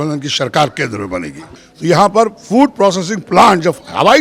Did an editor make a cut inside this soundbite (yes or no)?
yes